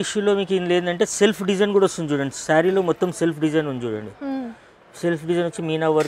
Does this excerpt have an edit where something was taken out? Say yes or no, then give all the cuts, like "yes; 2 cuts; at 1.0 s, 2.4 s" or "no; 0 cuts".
no; 0 cuts